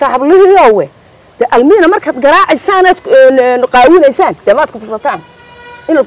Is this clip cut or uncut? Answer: uncut